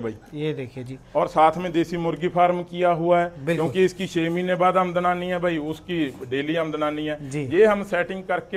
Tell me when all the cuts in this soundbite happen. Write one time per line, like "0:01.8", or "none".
none